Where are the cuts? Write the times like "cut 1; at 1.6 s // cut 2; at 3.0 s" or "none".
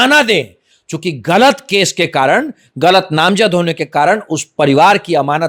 none